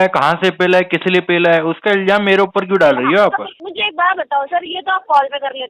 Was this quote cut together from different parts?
yes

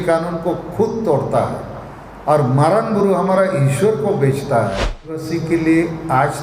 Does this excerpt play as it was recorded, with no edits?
no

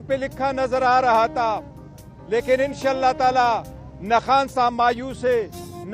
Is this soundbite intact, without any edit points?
yes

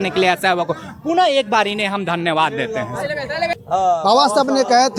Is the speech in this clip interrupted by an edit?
no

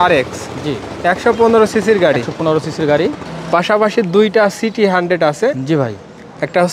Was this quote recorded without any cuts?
no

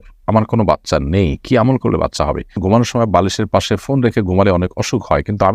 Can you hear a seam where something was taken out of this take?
yes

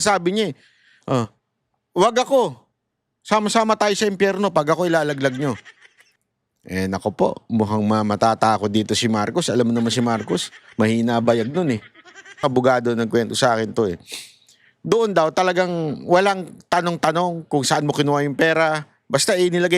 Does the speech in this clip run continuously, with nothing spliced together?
no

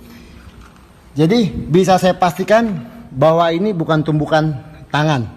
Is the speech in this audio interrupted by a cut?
no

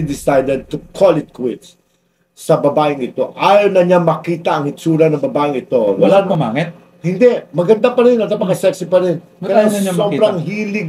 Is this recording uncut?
yes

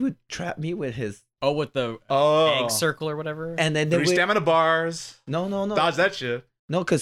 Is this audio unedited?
no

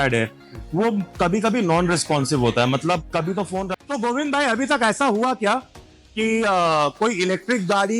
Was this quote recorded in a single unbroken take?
no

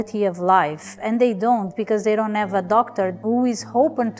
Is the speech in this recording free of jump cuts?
no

